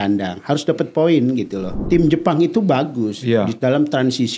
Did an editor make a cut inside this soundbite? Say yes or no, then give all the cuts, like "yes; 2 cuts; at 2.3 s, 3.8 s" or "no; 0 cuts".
yes; 1 cut; at 1.8 s